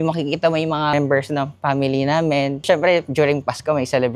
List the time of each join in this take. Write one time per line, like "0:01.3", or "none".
0:00.9
0:02.6